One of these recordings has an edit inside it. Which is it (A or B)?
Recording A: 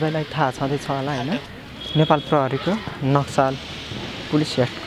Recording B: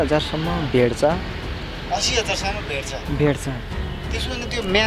A